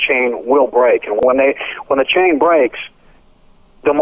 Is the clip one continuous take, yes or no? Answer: no